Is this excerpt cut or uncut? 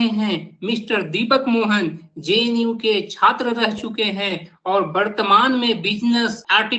uncut